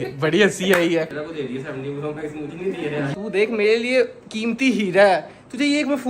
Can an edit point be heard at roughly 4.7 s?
no; 2 cuts; at 1.2 s, 3.1 s

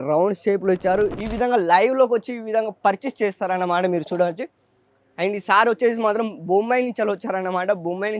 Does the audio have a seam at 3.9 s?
no; 1 cut; at 1.1 s

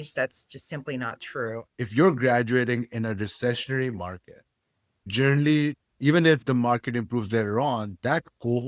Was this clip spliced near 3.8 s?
no; 2 cuts; at 1.6 s, 5.1 s

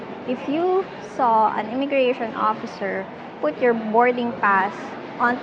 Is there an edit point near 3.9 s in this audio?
no; 0 cuts

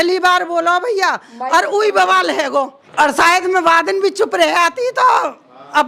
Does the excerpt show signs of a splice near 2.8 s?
yes; 1 cut; at 2.8 s

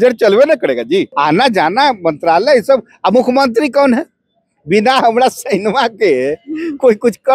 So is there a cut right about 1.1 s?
yes; 1 cut; at 1.1 s

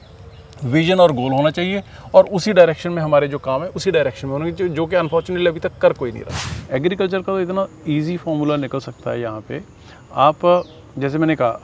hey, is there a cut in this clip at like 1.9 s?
no; 1 cut; at 6.5 s

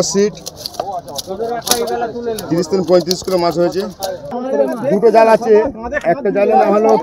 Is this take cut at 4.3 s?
yes; 1 cut; at 4.3 s

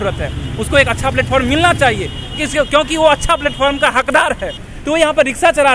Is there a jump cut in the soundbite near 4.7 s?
yes; 1 cut; at 4.7 s

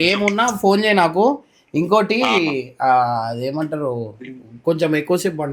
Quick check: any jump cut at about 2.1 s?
no; 0 cuts

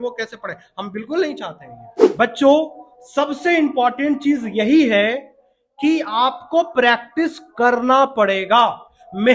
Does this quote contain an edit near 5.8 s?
no; 1 cut; at 1.9 s

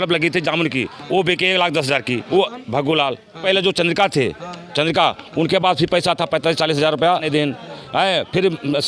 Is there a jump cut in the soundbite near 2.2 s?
yes; 3 cuts; at 2.2 s, 3.4 s, 7.3 s

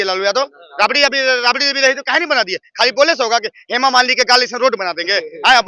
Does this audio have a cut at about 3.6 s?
no; 0 cuts

